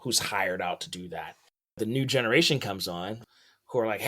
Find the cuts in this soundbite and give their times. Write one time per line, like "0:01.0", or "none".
0:01.8
0:03.1